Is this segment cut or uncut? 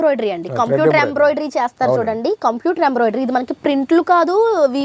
uncut